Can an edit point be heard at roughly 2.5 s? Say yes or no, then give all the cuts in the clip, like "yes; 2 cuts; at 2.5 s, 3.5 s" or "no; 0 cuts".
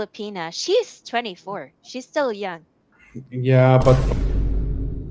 no; 1 cut; at 4.0 s